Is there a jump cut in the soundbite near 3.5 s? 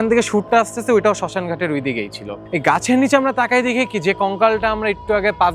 no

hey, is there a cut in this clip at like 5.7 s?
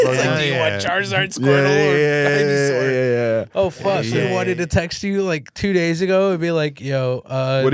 no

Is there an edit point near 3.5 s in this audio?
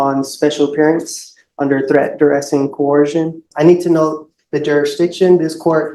yes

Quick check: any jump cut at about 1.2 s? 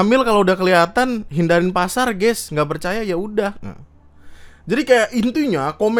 no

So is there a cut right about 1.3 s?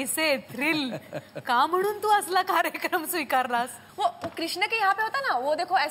no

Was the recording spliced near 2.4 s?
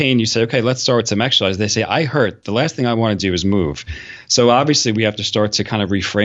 no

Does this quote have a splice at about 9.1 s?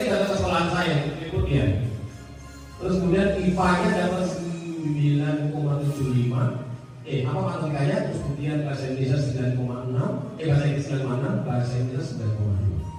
no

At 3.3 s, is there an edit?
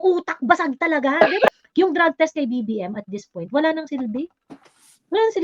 no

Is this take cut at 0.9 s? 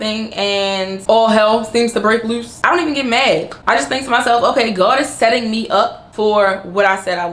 yes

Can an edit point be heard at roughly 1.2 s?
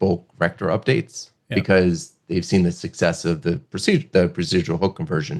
no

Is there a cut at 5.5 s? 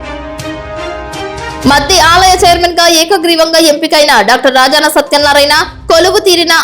no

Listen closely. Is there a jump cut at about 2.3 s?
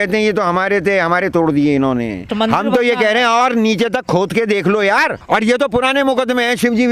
yes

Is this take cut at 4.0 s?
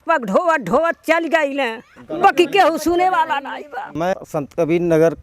yes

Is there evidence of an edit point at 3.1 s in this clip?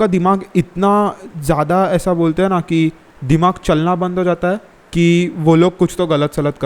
yes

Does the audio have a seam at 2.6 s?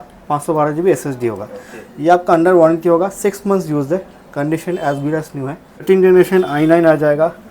no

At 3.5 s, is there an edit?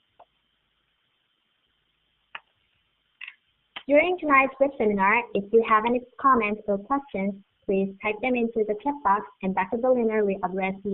yes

